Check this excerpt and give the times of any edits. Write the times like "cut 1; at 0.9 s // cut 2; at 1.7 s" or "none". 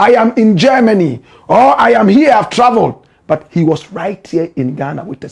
none